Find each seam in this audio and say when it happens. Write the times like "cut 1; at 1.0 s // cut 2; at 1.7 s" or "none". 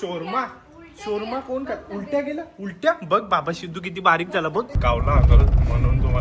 cut 1; at 4.7 s